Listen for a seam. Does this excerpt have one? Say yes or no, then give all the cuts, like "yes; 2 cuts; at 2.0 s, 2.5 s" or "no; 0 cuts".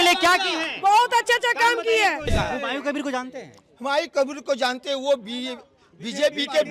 yes; 1 cut; at 2.3 s